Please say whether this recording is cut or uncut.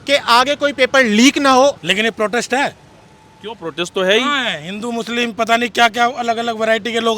cut